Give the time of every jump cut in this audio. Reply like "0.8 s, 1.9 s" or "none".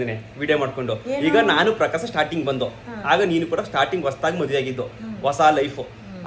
none